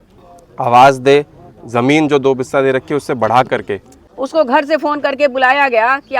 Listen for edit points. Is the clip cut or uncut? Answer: cut